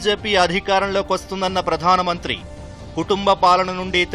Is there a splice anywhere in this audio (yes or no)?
no